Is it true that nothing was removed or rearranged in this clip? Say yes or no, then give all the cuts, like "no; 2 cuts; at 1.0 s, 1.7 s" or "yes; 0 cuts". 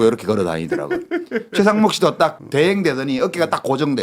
no; 1 cut; at 2.4 s